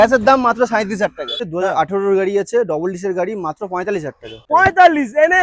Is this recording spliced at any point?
yes; 2 cuts; at 1.4 s, 4.4 s

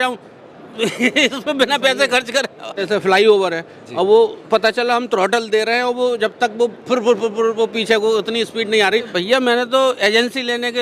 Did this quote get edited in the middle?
yes; 2 cuts; at 2.8 s, 9.1 s

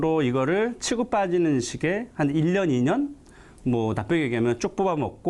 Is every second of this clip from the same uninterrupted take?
yes; 0 cuts

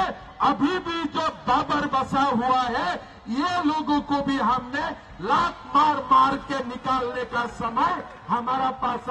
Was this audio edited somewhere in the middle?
no; 0 cuts

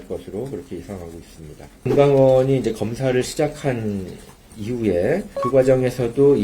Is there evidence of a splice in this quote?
yes; 2 cuts; at 1.9 s, 5.3 s

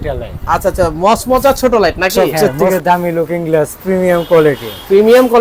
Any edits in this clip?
yes; 1 cut; at 2.2 s

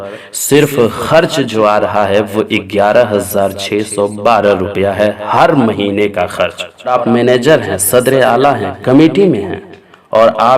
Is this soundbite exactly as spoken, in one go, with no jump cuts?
no; 1 cut; at 6.9 s

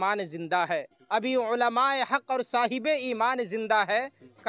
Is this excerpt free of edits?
yes; 0 cuts

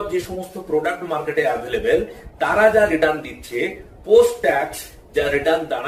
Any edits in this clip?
no; 0 cuts

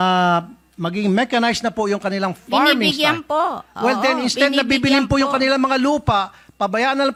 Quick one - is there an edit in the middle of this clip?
no; 0 cuts

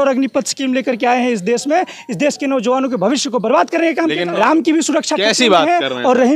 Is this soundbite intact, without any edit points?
no; 1 cut; at 4.2 s

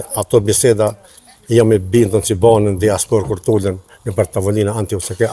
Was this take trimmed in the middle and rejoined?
no; 0 cuts

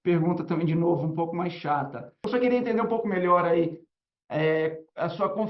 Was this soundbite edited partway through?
yes; 1 cut; at 2.1 s

